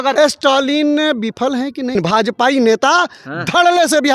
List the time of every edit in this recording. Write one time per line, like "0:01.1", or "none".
0:02.0